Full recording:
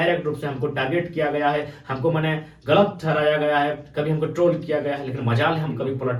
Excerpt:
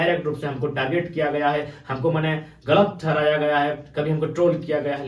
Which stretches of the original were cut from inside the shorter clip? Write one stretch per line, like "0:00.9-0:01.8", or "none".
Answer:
none

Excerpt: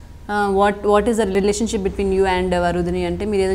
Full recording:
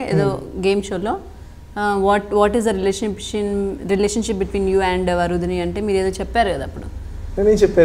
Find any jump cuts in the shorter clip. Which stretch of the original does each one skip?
0:02.8-0:03.9

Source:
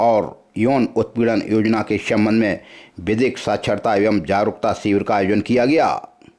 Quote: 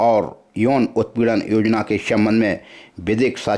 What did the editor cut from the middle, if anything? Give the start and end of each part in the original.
none

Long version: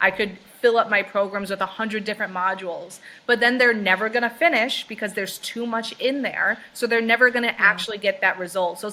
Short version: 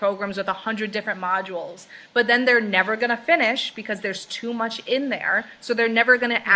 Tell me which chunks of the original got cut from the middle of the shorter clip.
none

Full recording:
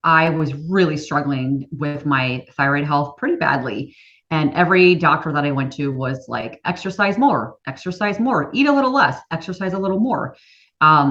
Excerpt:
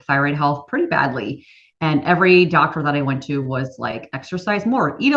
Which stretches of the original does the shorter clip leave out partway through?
0:06.5-0:07.6

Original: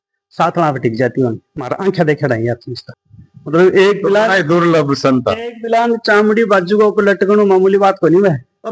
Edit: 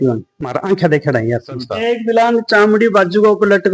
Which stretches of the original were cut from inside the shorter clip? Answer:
0:03.0-0:05.4

